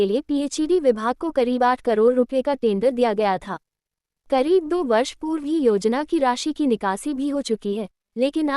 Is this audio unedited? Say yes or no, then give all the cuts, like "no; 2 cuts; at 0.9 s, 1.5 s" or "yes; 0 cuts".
no; 1 cut; at 6.9 s